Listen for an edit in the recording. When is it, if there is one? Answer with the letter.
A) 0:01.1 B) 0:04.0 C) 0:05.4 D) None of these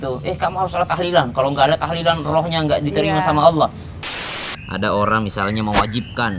B